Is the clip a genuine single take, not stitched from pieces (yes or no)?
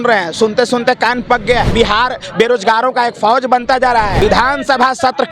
no